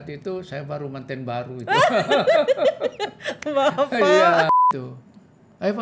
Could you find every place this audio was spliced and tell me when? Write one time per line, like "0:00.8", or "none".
0:04.5